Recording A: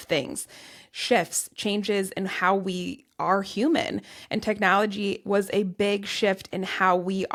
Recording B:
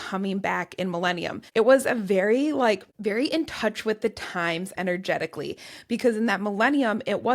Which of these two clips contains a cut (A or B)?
B